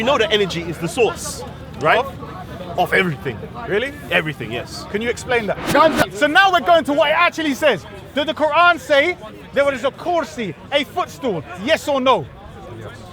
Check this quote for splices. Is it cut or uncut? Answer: cut